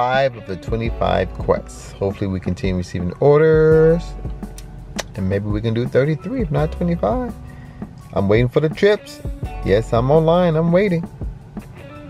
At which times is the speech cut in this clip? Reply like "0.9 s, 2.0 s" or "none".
none